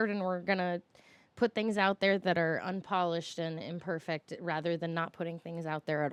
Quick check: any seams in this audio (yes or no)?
no